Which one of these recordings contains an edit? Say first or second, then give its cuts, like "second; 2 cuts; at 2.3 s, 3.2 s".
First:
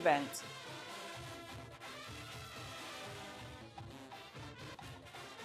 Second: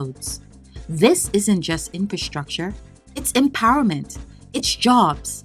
first; 2 cuts; at 3.6 s, 4.7 s